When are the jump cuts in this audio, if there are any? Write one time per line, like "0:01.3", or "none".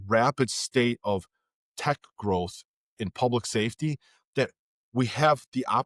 none